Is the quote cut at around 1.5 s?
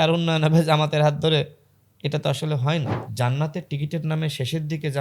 no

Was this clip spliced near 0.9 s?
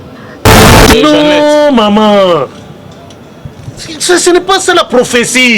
yes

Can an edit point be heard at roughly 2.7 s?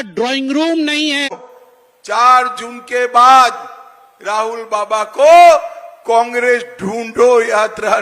no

